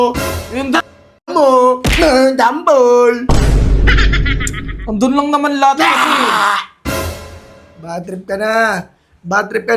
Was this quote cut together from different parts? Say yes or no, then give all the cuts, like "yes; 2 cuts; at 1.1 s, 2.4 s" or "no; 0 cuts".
no; 0 cuts